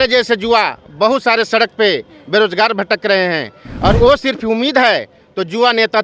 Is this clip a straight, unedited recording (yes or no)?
yes